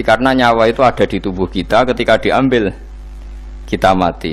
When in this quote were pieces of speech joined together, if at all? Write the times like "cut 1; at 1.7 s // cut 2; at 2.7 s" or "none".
none